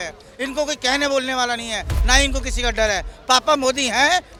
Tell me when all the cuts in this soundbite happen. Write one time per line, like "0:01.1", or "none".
none